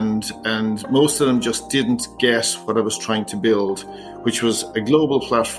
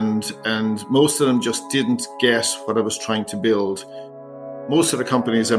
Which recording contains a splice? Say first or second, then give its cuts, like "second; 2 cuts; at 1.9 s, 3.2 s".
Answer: second; 1 cut; at 4.0 s